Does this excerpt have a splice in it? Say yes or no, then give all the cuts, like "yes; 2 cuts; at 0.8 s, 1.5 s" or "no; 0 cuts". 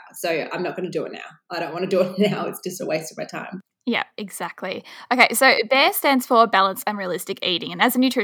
no; 0 cuts